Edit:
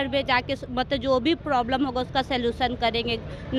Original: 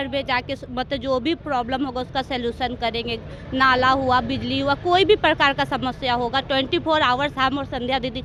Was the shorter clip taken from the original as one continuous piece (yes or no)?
yes